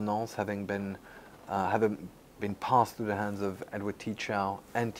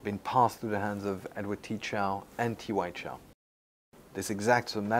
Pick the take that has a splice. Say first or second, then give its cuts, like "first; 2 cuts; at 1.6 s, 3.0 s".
second; 1 cut; at 3.8 s